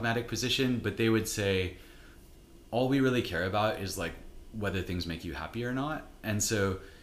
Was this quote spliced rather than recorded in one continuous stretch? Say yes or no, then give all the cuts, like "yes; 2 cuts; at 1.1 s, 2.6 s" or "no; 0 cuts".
no; 0 cuts